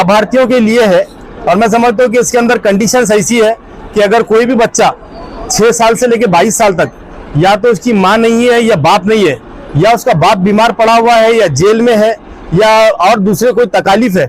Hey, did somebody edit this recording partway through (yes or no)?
no